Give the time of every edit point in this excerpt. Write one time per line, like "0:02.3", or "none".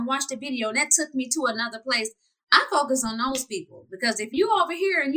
0:04.3